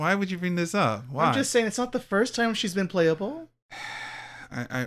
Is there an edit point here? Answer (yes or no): no